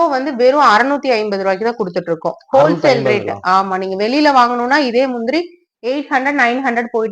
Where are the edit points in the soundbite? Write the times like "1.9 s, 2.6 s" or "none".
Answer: none